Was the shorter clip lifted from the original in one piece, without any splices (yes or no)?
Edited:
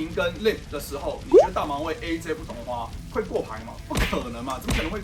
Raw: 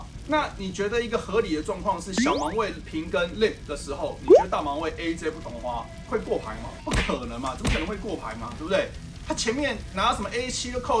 yes